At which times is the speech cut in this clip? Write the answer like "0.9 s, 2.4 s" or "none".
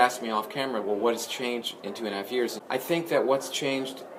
2.6 s